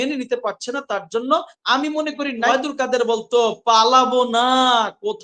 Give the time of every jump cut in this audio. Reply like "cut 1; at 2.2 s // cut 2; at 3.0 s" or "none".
cut 1; at 2.5 s